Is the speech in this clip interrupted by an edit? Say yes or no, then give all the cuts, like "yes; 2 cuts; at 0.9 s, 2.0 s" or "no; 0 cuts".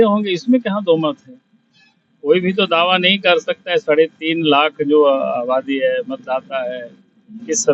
no; 0 cuts